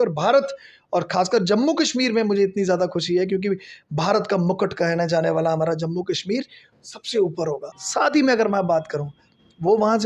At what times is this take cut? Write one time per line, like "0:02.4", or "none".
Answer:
0:07.7